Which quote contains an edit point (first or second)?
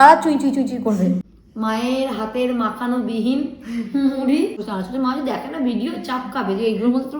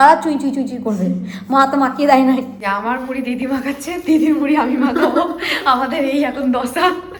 first